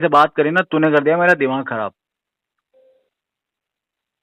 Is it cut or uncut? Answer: uncut